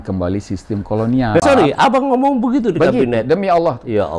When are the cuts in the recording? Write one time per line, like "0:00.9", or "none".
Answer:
0:01.4